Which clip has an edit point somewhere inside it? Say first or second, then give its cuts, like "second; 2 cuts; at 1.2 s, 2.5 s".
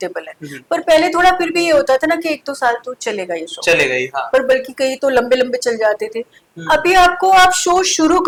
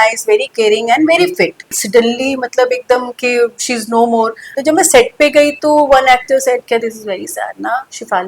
second; 2 cuts; at 1.7 s, 4.6 s